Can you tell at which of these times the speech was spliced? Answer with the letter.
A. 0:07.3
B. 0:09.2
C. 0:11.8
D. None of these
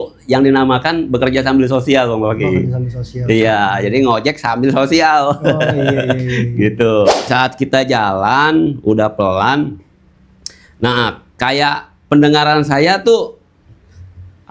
A